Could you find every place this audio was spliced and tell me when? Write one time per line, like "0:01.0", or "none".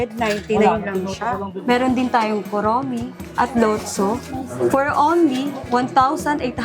0:01.5
0:03.2
0:04.5
0:05.6